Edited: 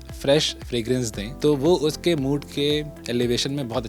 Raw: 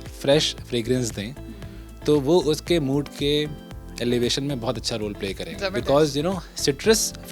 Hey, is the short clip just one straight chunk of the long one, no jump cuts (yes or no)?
no